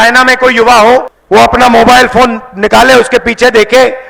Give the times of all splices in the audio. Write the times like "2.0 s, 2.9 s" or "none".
1.2 s